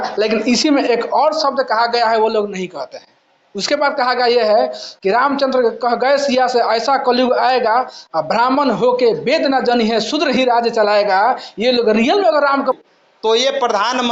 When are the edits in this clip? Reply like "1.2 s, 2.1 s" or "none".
12.8 s